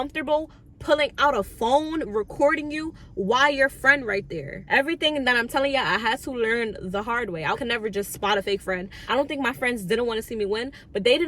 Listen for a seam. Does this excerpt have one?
yes; 3 cuts; at 4.5 s, 7.6 s, 8.9 s

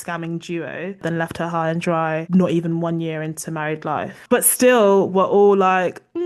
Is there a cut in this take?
yes; 3 cuts; at 1.0 s, 2.2 s, 4.2 s

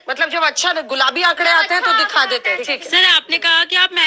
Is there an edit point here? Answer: yes; 1 cut; at 2.7 s

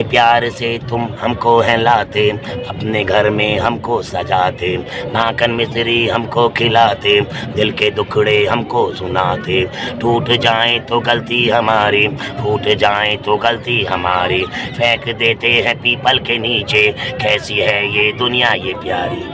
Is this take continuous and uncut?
yes; 0 cuts

